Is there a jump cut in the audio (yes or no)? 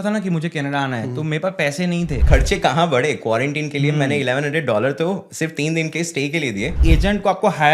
yes